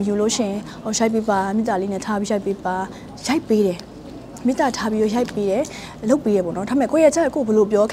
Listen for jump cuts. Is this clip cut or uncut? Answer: uncut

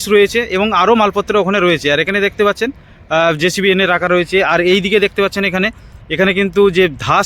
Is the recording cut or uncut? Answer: uncut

